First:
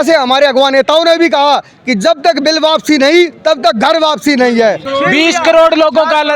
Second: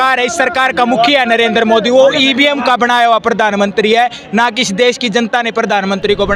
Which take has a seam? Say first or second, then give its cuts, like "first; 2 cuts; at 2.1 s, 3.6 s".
first; 1 cut; at 4.9 s